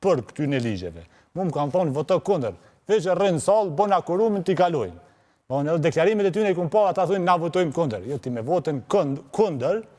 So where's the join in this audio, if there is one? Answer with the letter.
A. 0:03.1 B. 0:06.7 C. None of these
C